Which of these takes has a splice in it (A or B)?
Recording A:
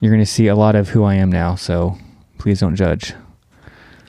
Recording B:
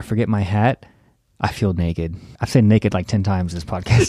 B